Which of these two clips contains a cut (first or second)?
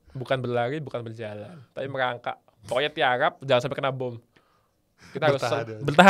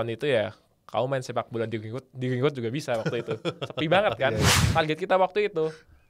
second